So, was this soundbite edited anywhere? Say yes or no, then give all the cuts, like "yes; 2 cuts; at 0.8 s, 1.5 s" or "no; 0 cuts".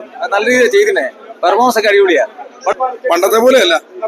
yes; 1 cut; at 2.7 s